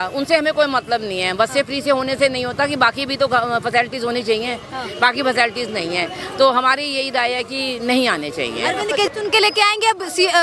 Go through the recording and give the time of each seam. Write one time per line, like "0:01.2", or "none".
0:09.1